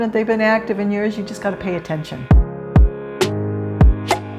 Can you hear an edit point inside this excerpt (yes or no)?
yes